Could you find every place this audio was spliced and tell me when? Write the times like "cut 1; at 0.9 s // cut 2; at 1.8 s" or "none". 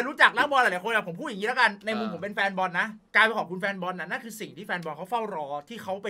none